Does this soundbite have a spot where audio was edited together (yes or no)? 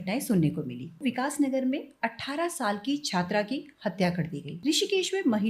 yes